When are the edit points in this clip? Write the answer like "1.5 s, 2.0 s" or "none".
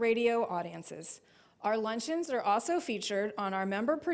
2.4 s